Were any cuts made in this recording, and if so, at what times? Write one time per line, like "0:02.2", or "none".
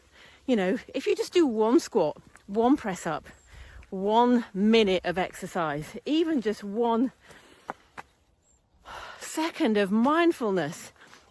none